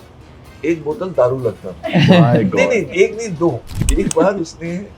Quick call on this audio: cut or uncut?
cut